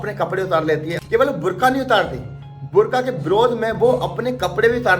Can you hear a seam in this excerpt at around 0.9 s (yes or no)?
yes